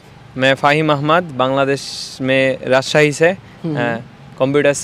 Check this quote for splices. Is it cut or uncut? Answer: uncut